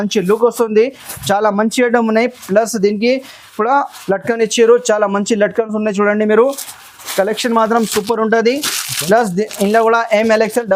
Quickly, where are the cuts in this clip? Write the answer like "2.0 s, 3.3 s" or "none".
none